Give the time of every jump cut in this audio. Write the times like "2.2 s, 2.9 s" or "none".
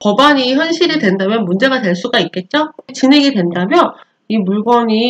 2.9 s